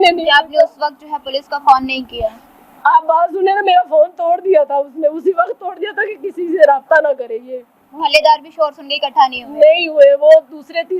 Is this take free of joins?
yes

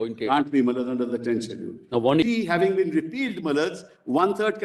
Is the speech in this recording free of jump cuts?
no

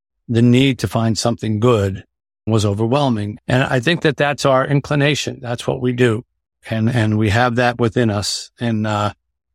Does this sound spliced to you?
yes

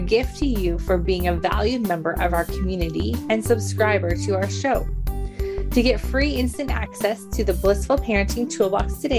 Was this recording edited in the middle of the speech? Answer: no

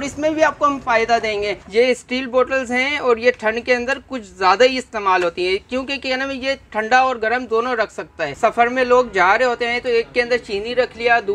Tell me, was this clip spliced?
yes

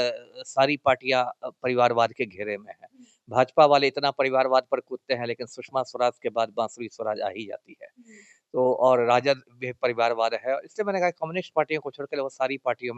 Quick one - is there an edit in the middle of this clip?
no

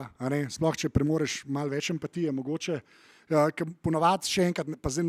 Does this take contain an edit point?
no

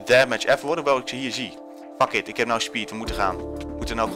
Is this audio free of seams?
yes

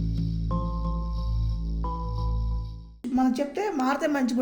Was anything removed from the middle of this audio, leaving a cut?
yes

